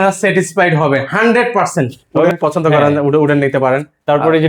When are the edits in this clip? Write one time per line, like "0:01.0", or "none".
0:02.1